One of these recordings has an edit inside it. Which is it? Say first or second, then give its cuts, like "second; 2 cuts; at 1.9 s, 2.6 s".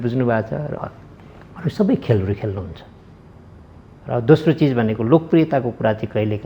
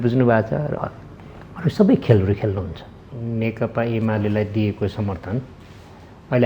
second; 1 cut; at 3.1 s